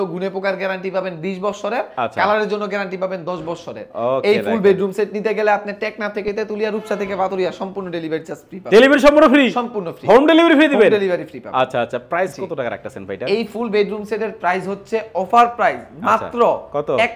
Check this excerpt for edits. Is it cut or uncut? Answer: uncut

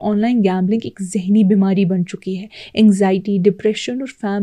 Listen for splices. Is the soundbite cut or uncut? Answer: uncut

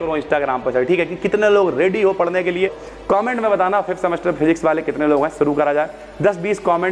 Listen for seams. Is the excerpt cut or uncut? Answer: cut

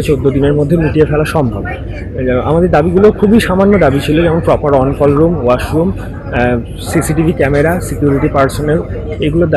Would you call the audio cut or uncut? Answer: uncut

